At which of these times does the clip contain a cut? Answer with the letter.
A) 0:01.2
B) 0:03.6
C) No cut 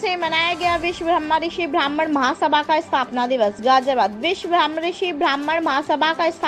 C